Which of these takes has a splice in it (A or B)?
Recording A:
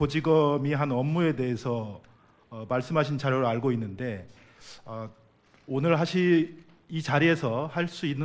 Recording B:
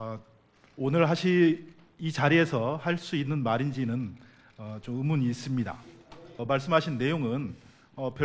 B